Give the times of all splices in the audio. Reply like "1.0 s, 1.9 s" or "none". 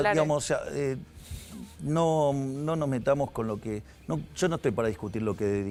none